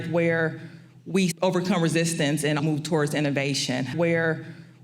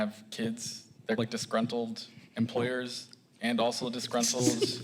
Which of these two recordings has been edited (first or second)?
first